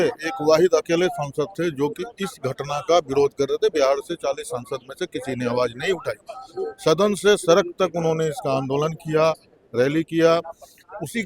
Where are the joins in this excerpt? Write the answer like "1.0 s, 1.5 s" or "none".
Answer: none